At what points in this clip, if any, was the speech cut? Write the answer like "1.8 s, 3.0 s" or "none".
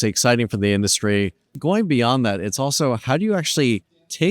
1.5 s